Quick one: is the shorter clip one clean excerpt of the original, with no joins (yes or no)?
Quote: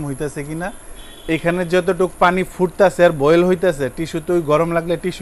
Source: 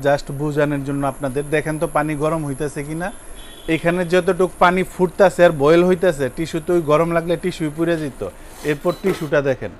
yes